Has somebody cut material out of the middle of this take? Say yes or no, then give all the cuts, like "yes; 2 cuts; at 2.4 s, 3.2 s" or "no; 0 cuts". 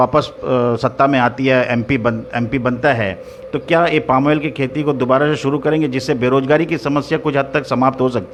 no; 0 cuts